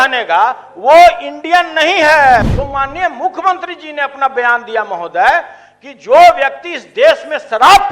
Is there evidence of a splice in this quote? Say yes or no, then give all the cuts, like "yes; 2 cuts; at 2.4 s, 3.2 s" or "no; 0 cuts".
yes; 1 cut; at 2.4 s